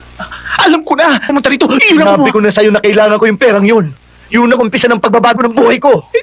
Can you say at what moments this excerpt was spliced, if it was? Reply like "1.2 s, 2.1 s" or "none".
1.3 s

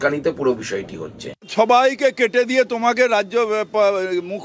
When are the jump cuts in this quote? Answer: 1.5 s

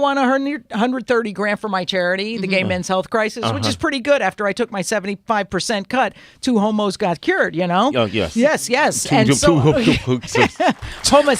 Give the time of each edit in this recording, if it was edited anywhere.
none

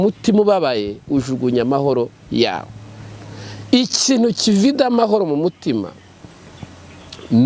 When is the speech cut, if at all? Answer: none

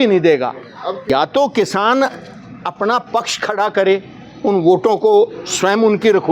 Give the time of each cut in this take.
1.0 s

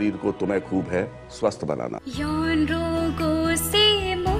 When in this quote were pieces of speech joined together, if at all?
2.0 s

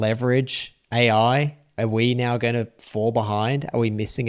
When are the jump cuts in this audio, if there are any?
none

